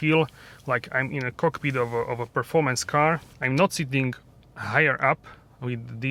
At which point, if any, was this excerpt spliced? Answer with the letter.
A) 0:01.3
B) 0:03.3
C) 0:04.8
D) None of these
D